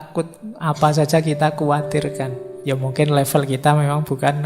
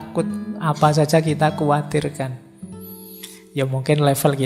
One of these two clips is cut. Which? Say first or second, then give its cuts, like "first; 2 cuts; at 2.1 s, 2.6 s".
first; 1 cut; at 2.5 s